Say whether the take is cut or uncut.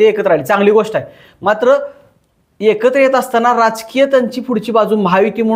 uncut